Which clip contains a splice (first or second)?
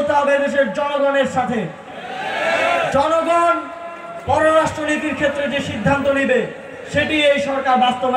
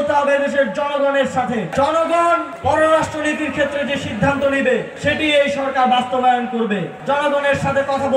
second